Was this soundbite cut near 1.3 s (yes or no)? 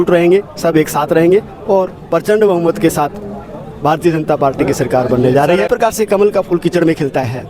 no